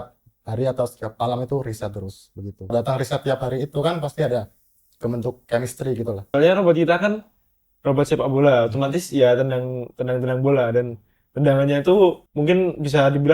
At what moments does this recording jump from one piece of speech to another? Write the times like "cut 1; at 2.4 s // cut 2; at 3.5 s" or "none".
cut 1; at 2.7 s // cut 2; at 6.2 s // cut 3; at 12.3 s